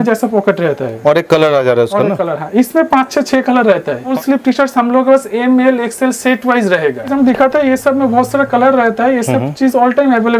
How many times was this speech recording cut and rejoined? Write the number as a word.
two